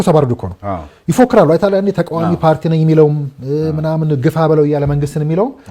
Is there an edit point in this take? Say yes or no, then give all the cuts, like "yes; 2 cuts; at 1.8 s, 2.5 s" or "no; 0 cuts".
no; 0 cuts